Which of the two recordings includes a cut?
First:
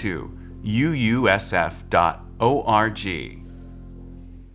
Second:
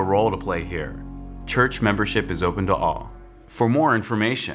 first; 1 cut; at 3.3 s

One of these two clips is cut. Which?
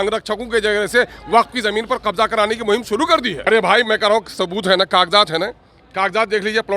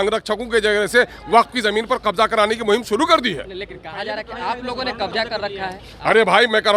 first; 1 cut; at 3.4 s

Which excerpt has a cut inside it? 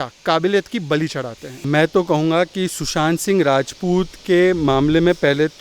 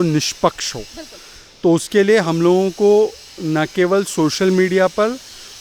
first; 1 cut; at 1.6 s

